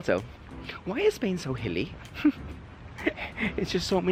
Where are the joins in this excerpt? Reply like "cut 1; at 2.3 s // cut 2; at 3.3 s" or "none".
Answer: none